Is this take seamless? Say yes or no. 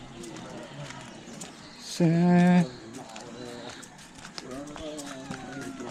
yes